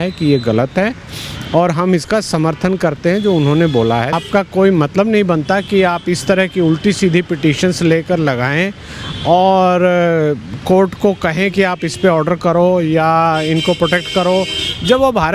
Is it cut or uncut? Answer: cut